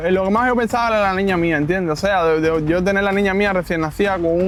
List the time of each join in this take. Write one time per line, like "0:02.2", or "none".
none

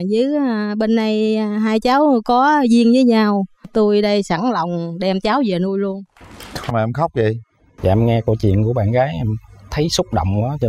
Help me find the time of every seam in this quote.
0:06.7

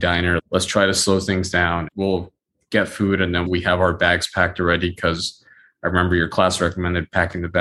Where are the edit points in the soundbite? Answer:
0:01.8
0:03.5

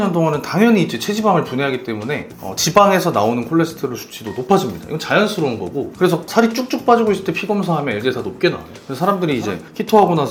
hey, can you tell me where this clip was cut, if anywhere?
none

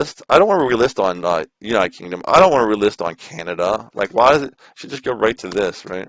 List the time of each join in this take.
none

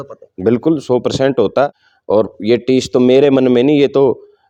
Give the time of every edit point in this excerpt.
none

